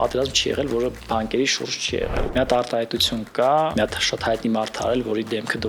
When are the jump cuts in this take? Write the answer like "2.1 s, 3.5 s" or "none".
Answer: 2.2 s, 3.7 s